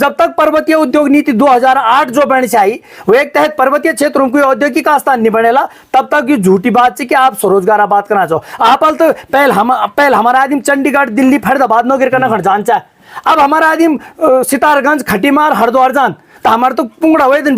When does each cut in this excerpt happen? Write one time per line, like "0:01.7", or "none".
none